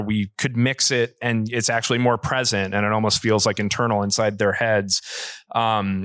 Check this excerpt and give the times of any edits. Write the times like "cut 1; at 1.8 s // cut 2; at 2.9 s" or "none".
none